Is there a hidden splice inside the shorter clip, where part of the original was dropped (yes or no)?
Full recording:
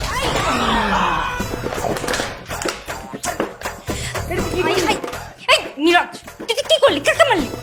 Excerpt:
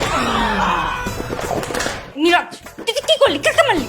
yes